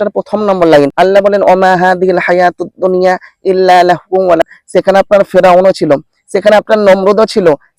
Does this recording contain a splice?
yes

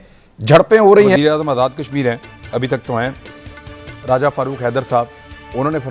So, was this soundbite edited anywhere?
yes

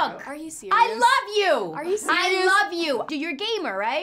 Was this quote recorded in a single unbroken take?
no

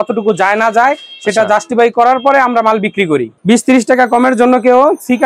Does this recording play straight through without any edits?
no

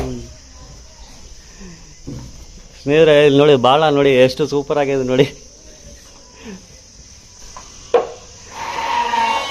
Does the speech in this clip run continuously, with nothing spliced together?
yes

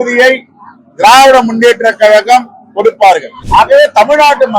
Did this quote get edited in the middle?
yes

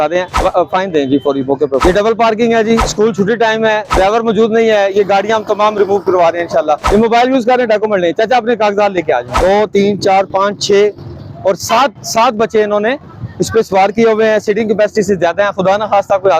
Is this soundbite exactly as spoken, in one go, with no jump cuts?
no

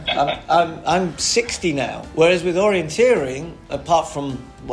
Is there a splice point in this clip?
yes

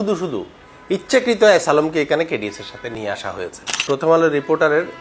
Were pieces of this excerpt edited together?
yes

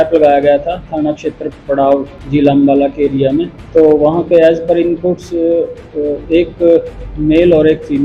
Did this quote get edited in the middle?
yes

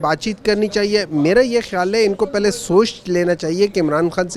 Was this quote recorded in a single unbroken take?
yes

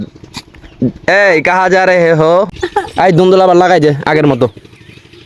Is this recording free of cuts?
no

